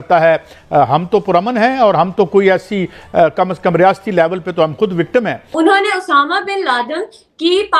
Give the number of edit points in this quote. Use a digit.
0